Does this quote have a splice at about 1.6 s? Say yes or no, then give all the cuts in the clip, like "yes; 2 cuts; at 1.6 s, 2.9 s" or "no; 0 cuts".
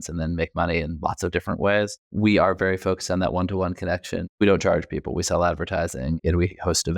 no; 2 cuts; at 4.3 s, 6.2 s